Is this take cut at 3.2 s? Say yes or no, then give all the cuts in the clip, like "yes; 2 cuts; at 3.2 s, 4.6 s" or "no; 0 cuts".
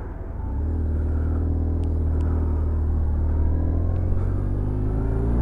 yes; 1 cut; at 3.2 s